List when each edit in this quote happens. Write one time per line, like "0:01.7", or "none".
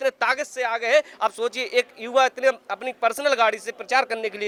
none